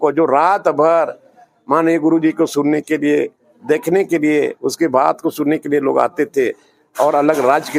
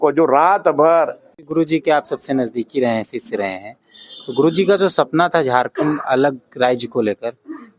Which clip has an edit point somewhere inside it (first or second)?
second